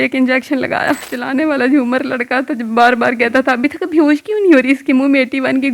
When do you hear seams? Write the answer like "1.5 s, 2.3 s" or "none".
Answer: none